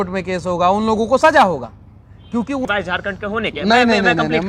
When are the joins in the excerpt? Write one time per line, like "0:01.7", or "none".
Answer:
0:02.6